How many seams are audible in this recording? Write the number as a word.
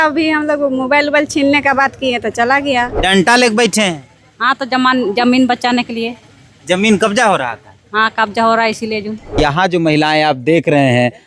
two